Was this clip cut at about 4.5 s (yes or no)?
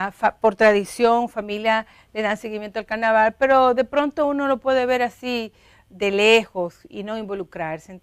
no